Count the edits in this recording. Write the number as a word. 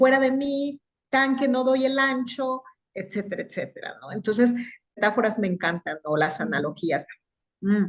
one